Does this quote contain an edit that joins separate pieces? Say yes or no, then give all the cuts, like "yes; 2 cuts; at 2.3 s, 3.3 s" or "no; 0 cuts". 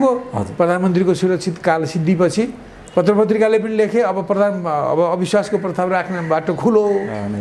no; 0 cuts